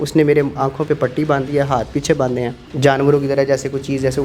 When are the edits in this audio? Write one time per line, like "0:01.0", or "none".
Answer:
0:02.6